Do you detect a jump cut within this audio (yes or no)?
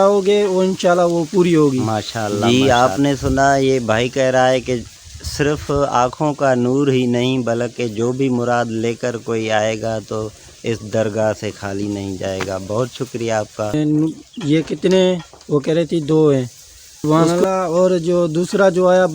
yes